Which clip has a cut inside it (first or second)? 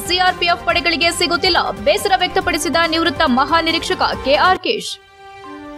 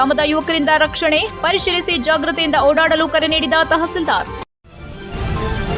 second